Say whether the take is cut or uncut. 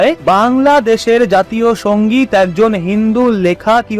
uncut